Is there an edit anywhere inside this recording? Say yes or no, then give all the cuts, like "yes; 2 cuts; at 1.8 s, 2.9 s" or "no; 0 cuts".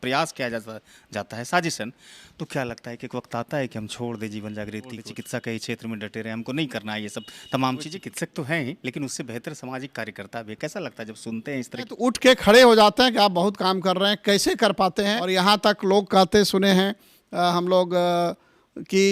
yes; 4 cuts; at 5.1 s, 7.9 s, 12.0 s, 15.2 s